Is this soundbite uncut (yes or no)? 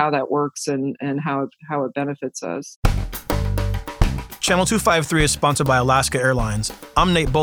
no